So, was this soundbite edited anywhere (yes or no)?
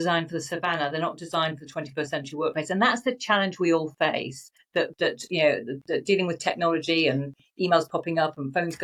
no